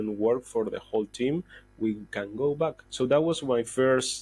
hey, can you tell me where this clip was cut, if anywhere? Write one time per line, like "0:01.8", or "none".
0:02.8